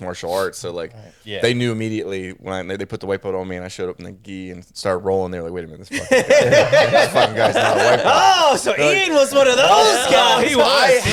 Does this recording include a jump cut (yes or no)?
no